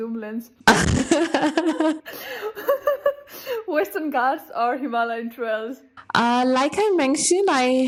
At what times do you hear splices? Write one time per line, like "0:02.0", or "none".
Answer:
none